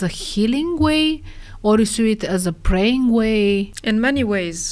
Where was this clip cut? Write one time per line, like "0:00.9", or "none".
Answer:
0:03.7